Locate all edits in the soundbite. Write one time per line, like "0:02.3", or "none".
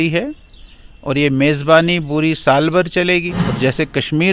0:03.4